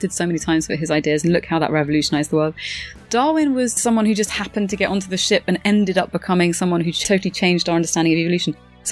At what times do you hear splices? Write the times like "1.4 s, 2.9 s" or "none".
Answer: none

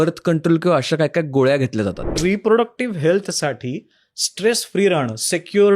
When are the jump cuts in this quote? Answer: 2.2 s

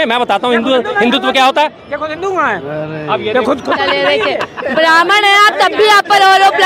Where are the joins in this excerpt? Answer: none

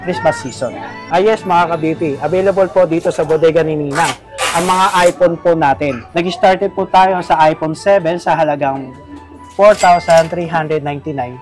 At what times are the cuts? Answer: 1.0 s, 6.0 s

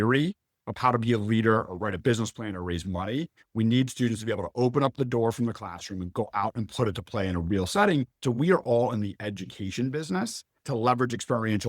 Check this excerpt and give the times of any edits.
8.2 s

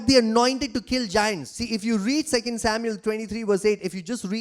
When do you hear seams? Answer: 1.6 s

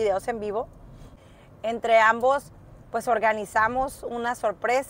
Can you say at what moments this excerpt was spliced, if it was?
1.1 s

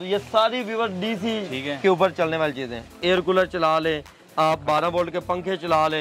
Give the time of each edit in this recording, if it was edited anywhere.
2.9 s

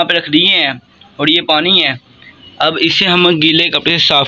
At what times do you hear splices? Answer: none

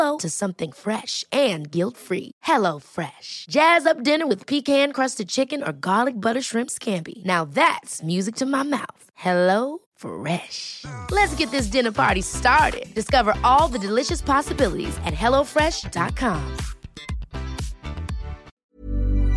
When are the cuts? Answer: 18.5 s

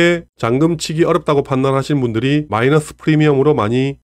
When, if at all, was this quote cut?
none

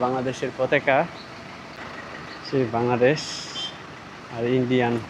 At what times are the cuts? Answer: 1.7 s

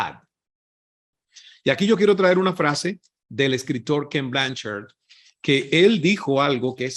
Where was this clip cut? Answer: 1.0 s

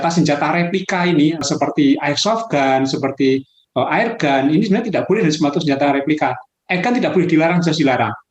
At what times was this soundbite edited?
1.4 s

